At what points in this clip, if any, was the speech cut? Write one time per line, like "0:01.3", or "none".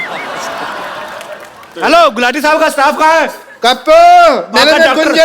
0:01.7